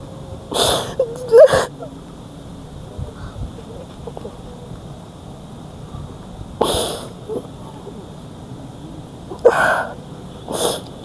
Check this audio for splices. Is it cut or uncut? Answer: uncut